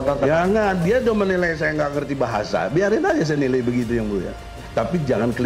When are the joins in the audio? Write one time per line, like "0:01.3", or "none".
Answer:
0:04.6